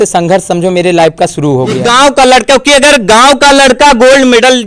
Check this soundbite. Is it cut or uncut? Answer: cut